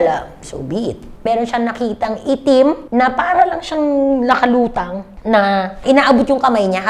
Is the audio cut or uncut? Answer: cut